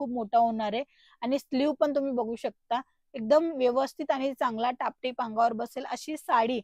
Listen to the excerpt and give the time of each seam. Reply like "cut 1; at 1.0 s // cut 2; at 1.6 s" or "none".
none